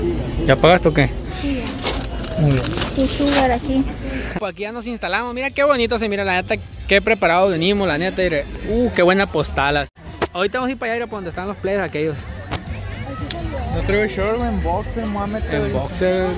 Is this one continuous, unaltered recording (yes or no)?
no